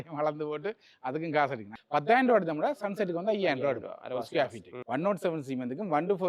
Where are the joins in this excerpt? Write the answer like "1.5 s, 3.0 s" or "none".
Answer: 1.7 s, 4.8 s